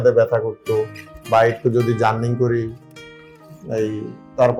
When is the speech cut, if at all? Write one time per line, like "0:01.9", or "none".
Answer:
none